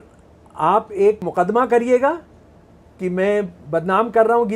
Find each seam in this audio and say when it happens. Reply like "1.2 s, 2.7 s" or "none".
1.2 s